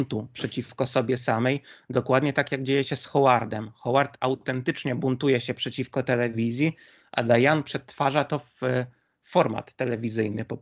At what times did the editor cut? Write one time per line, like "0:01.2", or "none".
none